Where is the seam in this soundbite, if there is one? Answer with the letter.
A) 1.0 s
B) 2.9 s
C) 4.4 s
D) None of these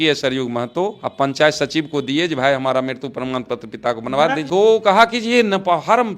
C